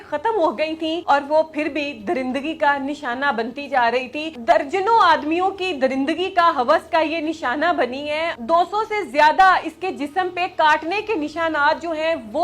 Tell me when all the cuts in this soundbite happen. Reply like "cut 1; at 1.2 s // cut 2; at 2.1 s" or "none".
cut 1; at 1.0 s // cut 2; at 4.2 s // cut 3; at 8.4 s